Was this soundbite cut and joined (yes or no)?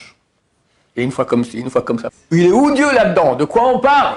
yes